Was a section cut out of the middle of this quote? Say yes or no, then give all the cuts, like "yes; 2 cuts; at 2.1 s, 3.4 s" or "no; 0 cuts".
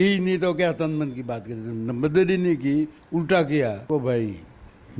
yes; 1 cut; at 3.8 s